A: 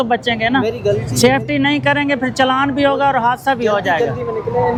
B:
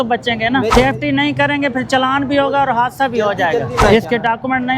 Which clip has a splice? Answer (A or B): B